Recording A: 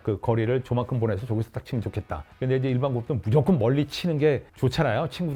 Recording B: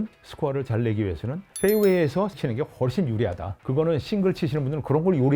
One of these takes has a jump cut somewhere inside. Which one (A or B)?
B